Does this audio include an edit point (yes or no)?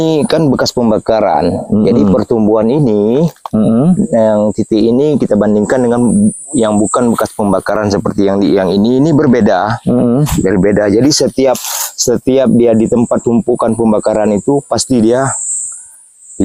no